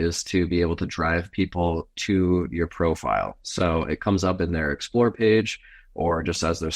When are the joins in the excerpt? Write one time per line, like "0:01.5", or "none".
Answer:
none